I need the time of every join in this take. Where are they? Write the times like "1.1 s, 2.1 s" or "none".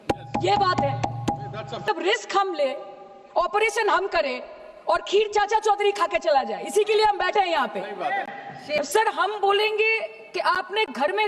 1.9 s, 8.8 s